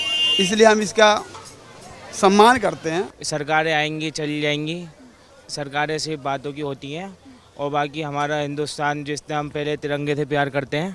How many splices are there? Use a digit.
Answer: 1